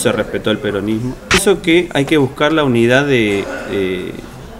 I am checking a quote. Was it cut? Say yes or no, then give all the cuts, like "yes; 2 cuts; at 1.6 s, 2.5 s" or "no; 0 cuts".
yes; 1 cut; at 1.3 s